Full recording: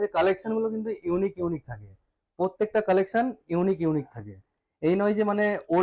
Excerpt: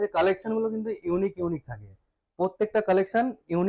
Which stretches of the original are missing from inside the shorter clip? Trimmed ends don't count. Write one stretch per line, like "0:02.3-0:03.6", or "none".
none

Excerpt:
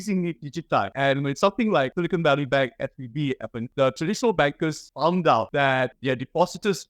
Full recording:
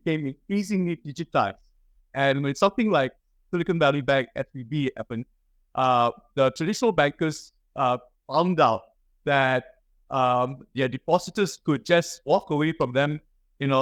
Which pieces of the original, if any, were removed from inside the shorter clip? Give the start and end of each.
0:01.5-0:02.1
0:03.1-0:03.5
0:05.2-0:06.2
0:07.4-0:08.2
0:09.2-0:10.6

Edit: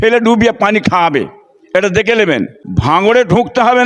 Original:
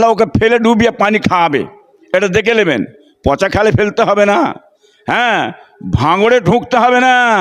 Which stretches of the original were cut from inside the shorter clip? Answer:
0:03.0-0:05.8

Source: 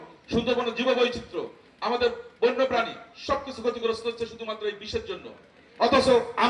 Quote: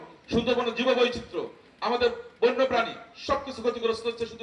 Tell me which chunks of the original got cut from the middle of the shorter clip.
none

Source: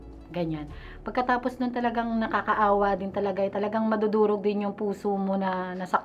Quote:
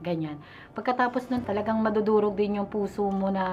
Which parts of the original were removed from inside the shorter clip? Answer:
0:01.7-0:03.5

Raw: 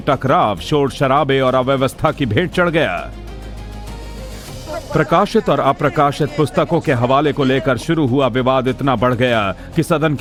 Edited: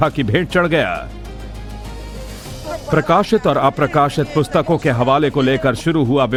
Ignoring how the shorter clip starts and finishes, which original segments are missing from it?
none

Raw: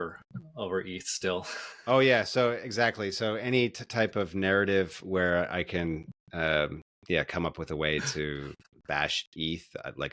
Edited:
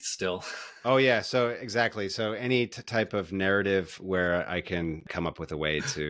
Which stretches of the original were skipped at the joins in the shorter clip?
0:06.1-0:07.3

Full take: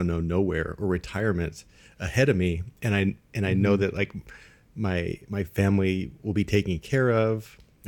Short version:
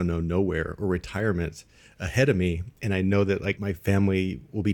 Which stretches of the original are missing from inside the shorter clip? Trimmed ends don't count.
0:02.7-0:03.2
0:04.1-0:05.3

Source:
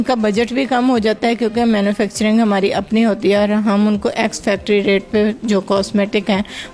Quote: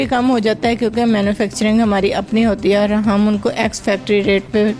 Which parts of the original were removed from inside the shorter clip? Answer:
none

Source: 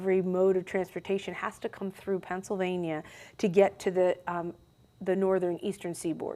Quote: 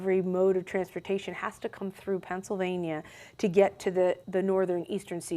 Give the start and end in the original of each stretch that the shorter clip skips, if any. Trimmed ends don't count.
0:04.2-0:05.0

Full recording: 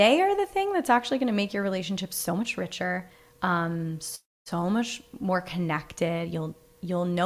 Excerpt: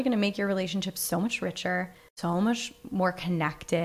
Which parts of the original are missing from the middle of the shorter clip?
0:03.2-0:04.3

